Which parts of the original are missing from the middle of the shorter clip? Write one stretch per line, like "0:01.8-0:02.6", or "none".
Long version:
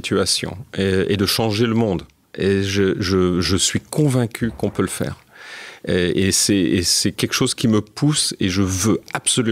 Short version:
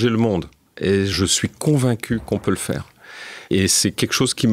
0:02.7-0:03.5
0:05.9-0:06.8